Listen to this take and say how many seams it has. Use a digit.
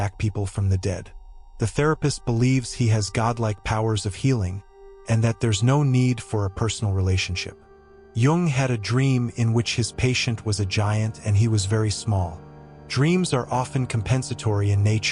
1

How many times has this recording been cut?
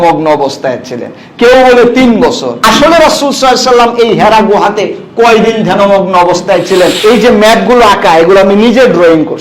2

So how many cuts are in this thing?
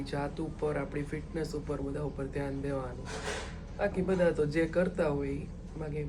0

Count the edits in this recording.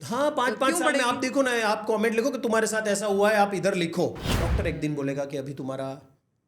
1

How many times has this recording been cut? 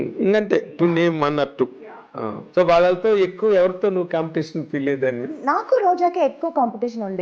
2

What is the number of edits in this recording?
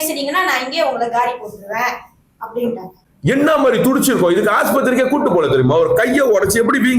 1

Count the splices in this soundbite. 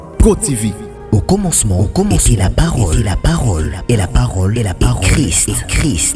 1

